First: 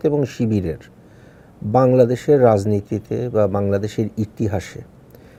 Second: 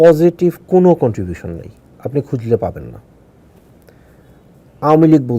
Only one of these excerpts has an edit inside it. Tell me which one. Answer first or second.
second